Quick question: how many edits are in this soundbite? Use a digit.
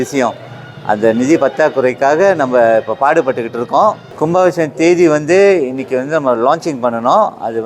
1